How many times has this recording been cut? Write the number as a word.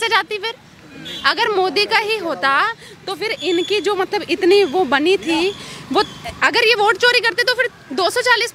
zero